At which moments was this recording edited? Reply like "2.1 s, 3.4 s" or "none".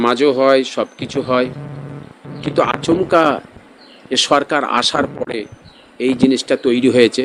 none